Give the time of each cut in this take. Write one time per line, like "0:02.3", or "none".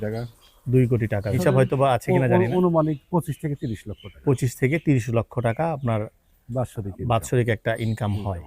0:01.4